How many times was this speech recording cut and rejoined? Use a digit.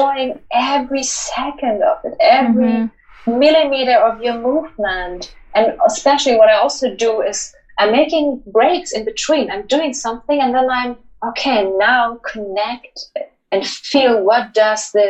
0